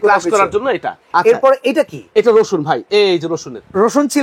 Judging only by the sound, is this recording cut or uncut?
cut